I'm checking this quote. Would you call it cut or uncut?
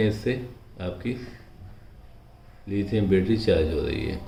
uncut